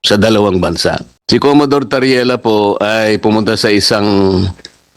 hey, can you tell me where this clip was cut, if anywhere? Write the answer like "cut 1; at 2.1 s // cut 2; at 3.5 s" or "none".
cut 1; at 1.1 s